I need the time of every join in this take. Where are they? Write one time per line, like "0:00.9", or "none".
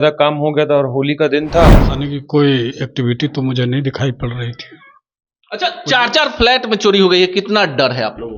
0:01.9